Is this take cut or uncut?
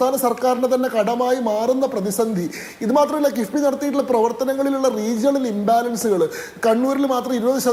uncut